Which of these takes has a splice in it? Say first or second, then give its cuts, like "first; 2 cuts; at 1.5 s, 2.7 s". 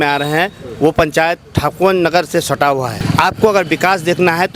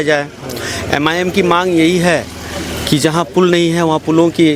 first; 1 cut; at 3.0 s